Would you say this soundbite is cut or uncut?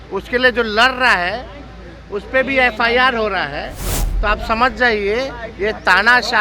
uncut